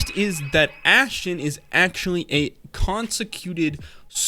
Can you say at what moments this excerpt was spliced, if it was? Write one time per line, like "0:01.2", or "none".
none

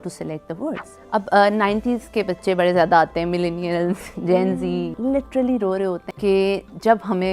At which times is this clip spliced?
0:00.9
0:04.9
0:06.1

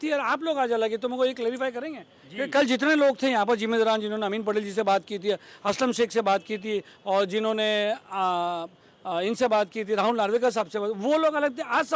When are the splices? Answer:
none

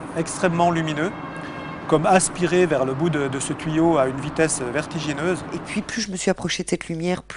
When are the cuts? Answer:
0:05.7

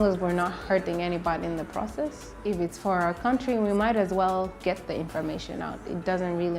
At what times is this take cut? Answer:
0:02.3

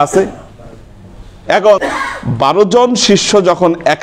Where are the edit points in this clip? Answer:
0:01.8

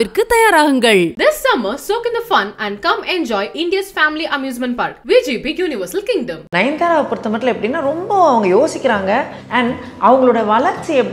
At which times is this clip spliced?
0:06.4
0:09.4

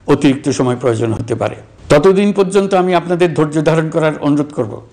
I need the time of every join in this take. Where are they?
0:01.7

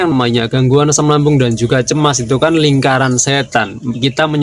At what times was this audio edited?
none

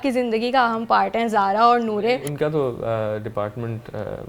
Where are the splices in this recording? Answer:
0:02.2

